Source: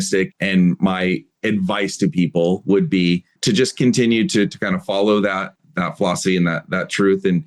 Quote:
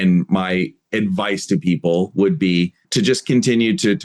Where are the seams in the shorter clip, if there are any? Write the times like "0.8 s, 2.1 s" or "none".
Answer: none